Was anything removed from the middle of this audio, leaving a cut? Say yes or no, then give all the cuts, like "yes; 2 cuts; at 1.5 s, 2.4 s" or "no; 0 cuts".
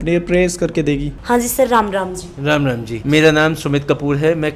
no; 0 cuts